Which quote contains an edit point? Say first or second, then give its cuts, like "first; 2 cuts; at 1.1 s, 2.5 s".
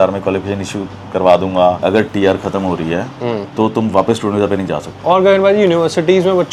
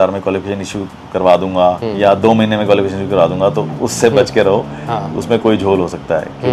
first; 2 cuts; at 1.8 s, 4.9 s